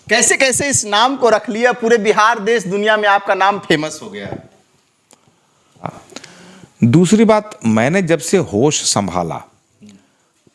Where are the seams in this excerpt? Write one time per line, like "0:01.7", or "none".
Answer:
0:05.9